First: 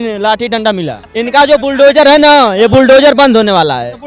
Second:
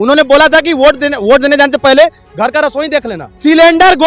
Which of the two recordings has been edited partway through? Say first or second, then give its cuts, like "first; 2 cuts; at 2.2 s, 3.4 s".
first; 1 cut; at 1.0 s